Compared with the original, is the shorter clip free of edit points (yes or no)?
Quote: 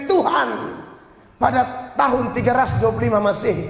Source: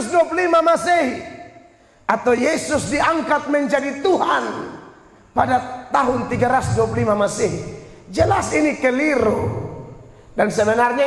yes